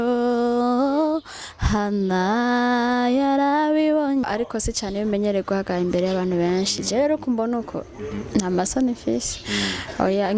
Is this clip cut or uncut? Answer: cut